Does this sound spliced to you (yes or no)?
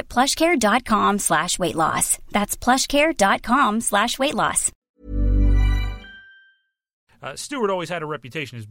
yes